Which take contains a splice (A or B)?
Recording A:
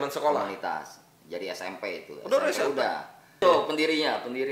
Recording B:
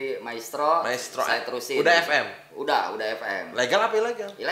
A